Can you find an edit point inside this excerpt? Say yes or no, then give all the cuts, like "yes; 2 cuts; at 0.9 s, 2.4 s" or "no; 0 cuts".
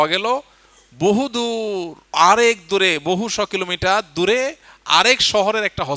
no; 0 cuts